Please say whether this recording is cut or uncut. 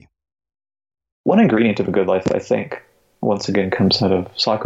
cut